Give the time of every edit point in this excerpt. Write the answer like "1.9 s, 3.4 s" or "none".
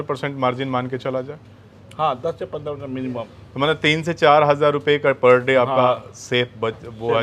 none